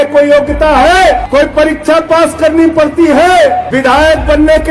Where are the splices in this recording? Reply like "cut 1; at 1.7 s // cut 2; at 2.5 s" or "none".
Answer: cut 1; at 1.2 s // cut 2; at 3.7 s